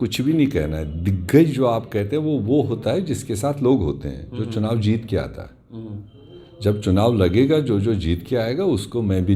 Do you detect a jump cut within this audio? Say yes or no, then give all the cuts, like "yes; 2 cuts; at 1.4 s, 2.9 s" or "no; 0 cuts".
no; 0 cuts